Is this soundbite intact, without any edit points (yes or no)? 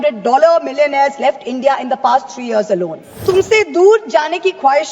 no